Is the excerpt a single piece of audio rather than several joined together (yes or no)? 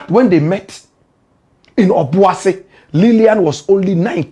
yes